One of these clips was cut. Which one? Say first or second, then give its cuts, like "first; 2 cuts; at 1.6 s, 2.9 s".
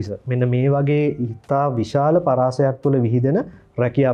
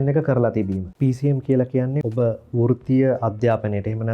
second; 2 cuts; at 0.9 s, 2.0 s